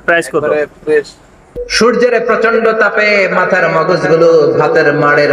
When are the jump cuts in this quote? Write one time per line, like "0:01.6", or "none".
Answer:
0:01.6